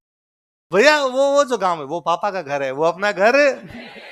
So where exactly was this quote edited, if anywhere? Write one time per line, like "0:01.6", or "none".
none